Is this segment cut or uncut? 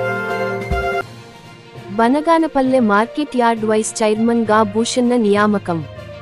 uncut